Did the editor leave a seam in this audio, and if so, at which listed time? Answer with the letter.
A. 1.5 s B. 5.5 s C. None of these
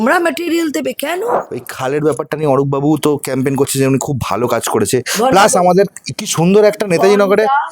A